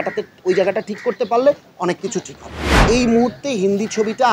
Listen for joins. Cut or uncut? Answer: cut